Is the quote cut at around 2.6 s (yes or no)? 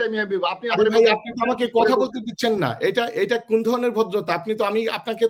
no